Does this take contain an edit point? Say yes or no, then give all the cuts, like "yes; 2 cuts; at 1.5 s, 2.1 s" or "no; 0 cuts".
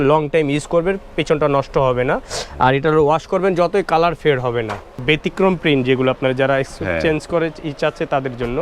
yes; 1 cut; at 5.0 s